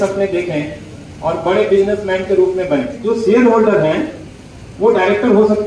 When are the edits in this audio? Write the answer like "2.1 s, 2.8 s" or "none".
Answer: 3.0 s